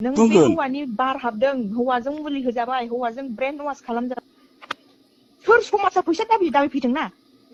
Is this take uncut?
yes; 0 cuts

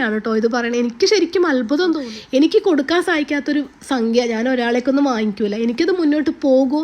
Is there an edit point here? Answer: yes; 1 cut; at 2.1 s

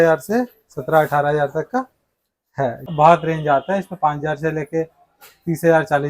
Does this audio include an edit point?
yes; 1 cut; at 2.9 s

